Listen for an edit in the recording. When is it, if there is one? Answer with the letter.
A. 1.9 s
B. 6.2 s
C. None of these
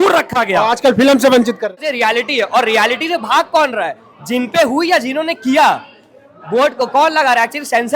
A